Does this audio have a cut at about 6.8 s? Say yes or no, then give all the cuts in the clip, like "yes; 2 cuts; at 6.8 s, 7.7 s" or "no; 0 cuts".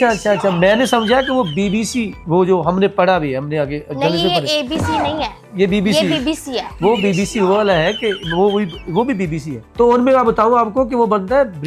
no; 1 cut; at 2.2 s